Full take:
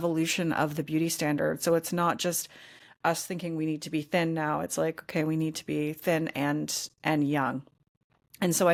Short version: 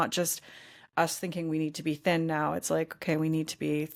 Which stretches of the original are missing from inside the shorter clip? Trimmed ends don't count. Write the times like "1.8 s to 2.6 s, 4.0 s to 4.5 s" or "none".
none